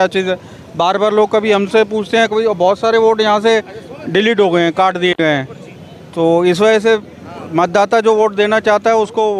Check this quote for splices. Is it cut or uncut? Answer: uncut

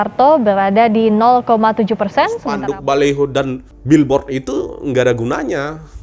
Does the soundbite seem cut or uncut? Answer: cut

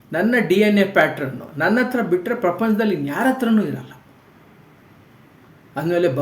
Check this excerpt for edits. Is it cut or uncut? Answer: uncut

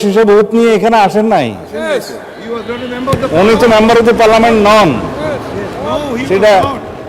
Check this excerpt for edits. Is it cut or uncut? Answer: uncut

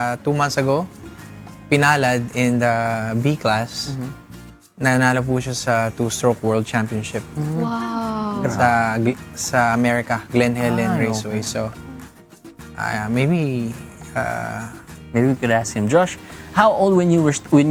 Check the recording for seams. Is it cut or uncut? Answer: uncut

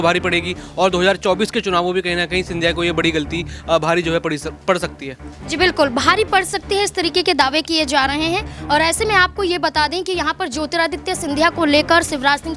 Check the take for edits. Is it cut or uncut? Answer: uncut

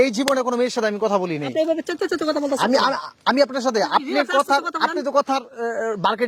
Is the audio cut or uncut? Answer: uncut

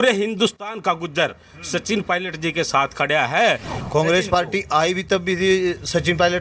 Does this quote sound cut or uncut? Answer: cut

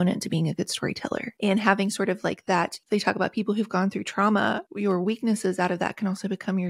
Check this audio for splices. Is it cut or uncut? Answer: cut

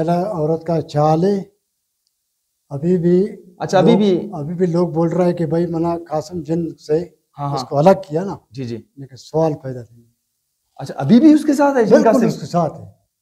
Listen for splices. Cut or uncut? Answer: uncut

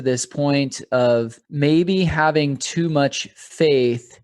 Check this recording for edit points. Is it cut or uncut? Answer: cut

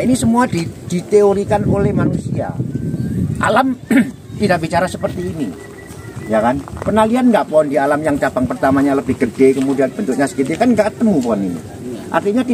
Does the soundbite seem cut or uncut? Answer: uncut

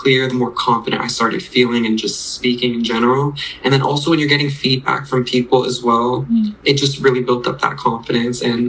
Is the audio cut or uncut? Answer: uncut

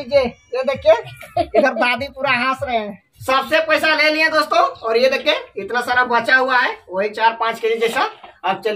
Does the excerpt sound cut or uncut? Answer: cut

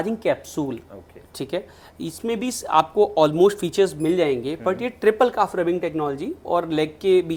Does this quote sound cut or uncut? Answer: uncut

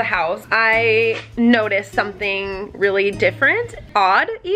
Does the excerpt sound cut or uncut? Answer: uncut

